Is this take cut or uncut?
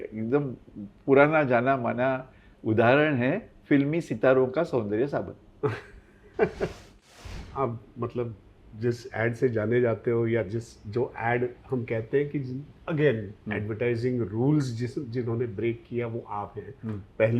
cut